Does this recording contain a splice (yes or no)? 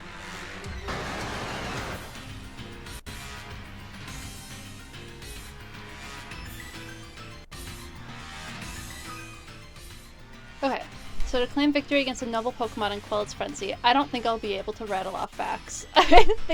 no